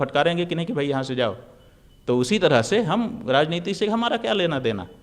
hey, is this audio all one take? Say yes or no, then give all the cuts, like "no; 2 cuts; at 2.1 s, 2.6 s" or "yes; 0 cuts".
yes; 0 cuts